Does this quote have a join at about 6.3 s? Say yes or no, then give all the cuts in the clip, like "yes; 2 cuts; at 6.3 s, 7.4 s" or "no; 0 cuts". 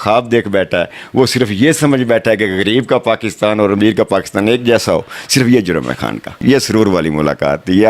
yes; 1 cut; at 6.3 s